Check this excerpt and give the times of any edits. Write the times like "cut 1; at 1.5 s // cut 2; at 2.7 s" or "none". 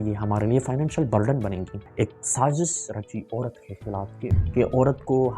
cut 1; at 1.8 s // cut 2; at 4.4 s